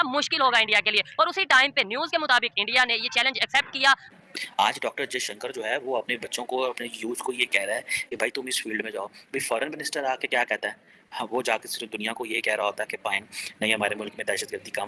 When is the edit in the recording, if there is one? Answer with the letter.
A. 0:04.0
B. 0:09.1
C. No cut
A